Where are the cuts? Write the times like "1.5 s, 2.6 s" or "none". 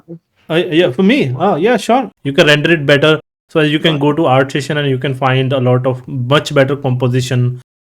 2.1 s